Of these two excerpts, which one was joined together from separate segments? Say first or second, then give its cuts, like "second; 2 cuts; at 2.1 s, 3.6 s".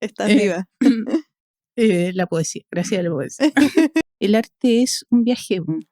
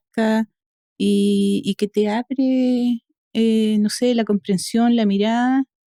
first; 1 cut; at 4.1 s